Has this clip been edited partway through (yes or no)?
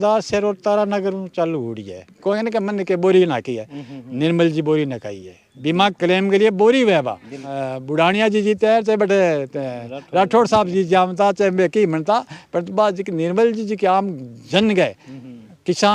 yes